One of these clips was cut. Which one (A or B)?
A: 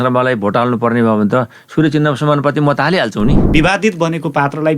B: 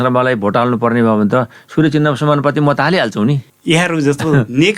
A